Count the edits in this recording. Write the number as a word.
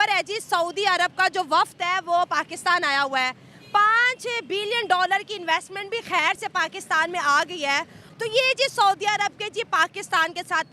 one